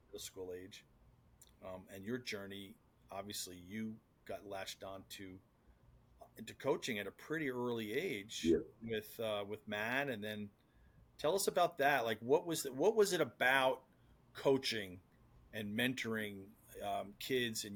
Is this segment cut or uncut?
uncut